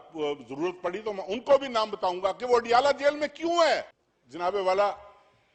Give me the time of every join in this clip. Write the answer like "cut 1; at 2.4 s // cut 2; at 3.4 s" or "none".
none